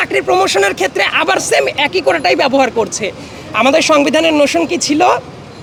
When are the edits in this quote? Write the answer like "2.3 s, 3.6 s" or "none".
none